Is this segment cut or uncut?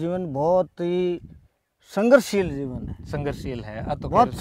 uncut